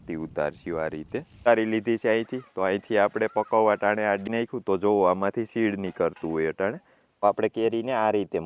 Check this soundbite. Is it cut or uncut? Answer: cut